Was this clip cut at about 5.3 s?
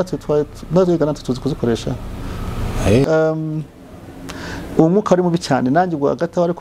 no; 1 cut; at 3.0 s

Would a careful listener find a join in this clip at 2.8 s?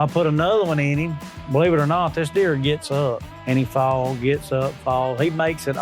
no; 1 cut; at 1.3 s

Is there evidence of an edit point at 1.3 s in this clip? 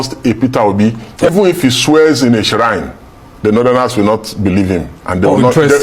yes; 1 cut; at 1.3 s

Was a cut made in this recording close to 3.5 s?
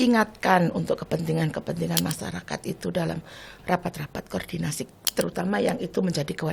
no; 0 cuts

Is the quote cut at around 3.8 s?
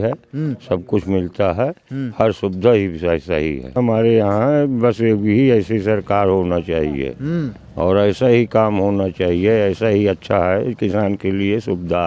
yes; 1 cut; at 3.8 s

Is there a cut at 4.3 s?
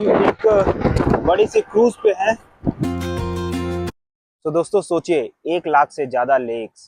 no; 1 cut; at 2.8 s

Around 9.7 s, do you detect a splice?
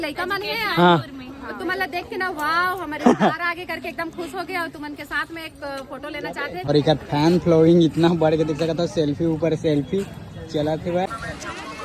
no; 2 cuts; at 6.6 s, 11.1 s

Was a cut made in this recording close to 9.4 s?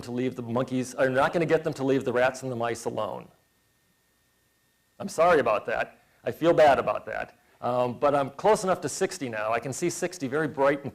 no; 1 cut; at 8.1 s

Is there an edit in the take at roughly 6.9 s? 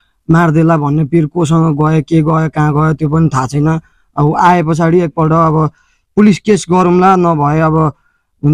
no; 0 cuts

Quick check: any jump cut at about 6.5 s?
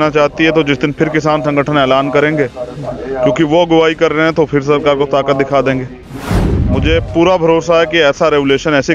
yes; 1 cut; at 6.5 s

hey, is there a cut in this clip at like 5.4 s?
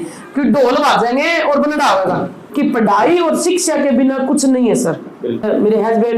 yes; 2 cuts; at 2.4 s, 5.4 s

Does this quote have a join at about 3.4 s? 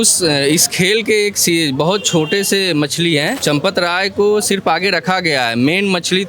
yes; 1 cut; at 3.4 s

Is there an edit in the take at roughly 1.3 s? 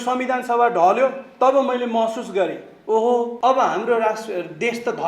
no; 1 cut; at 3.3 s

